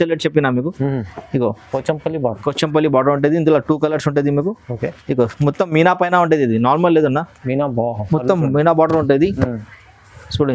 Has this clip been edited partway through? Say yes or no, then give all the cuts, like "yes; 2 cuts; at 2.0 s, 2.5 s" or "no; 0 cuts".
no; 0 cuts